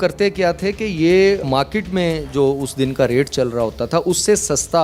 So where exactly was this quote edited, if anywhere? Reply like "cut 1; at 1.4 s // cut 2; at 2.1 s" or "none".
none

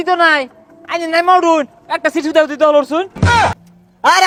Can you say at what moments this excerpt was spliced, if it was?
none

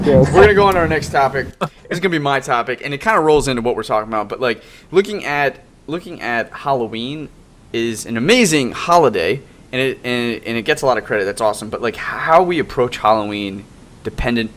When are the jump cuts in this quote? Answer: none

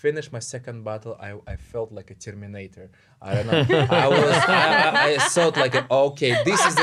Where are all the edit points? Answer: none

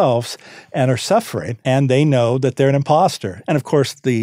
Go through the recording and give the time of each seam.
cut 1; at 1.4 s // cut 2; at 3.3 s

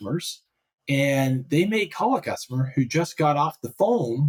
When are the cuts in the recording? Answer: none

